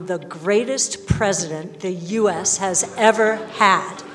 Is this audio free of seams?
yes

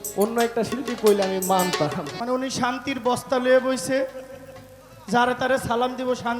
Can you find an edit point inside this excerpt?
yes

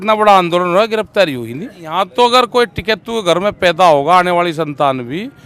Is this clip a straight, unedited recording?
no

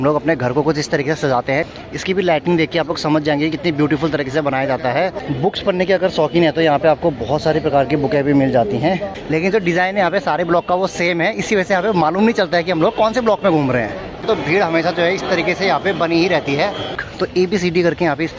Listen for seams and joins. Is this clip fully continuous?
no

